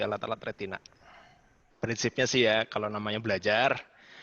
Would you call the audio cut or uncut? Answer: cut